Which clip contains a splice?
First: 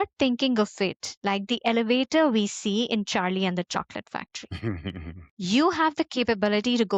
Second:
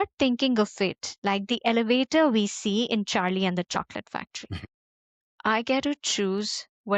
second; 1 cut; at 4.6 s

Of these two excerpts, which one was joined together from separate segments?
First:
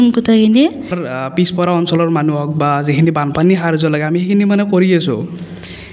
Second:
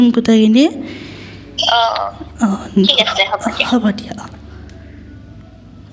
first; 1 cut; at 1.0 s

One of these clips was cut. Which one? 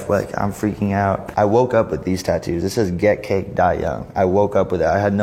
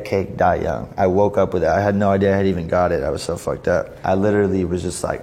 first; 1 cut; at 1.2 s

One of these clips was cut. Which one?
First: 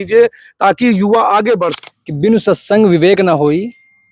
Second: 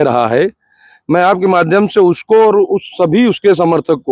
first; 1 cut; at 1.8 s

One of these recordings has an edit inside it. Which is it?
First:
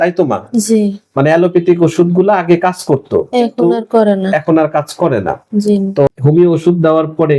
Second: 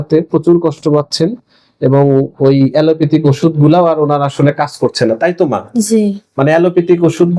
first; 1 cut; at 6.1 s

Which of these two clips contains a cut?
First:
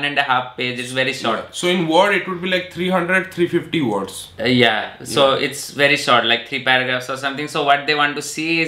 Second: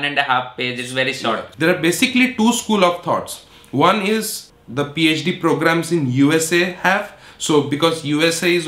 second; 2 cuts; at 1.5 s, 4.4 s

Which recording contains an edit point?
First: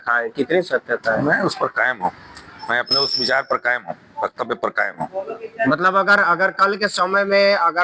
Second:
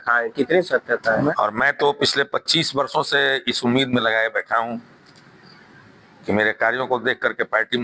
second; 1 cut; at 1.3 s

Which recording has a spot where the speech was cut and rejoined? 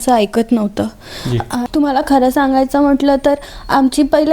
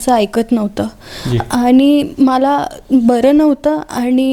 first; 1 cut; at 1.5 s

